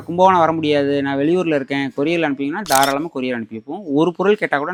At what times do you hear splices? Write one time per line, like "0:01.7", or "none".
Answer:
none